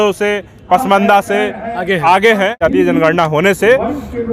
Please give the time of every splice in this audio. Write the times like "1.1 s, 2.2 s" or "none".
2.6 s